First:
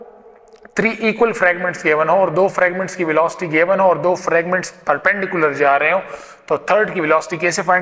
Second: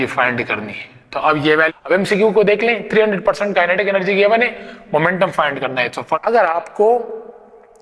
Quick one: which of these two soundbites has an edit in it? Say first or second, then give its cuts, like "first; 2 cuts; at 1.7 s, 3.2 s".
second; 2 cuts; at 1.7 s, 6.2 s